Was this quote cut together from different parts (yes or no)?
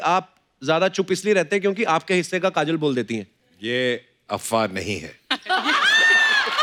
no